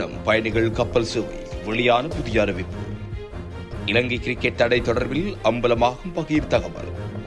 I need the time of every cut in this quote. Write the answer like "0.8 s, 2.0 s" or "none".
none